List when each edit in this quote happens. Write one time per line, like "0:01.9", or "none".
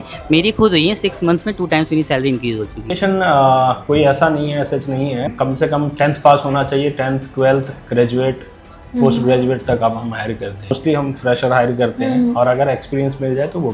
0:03.0
0:05.3
0:10.7